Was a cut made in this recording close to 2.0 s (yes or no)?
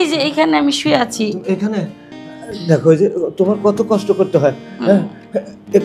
yes